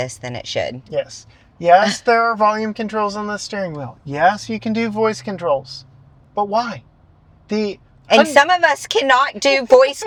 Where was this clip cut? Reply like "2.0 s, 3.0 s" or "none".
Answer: none